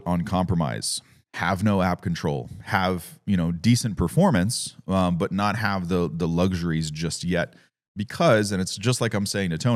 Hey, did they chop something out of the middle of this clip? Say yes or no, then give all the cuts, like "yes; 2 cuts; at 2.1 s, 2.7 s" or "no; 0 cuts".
no; 0 cuts